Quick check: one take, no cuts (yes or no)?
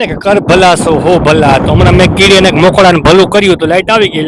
yes